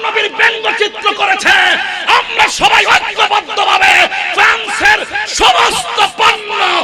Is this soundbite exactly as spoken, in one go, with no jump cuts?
yes; 0 cuts

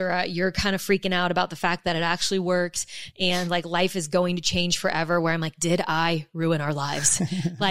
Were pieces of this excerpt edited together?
no; 0 cuts

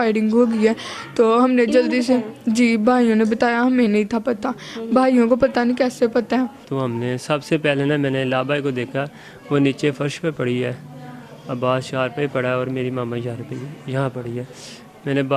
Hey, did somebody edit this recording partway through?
yes; 1 cut; at 6.7 s

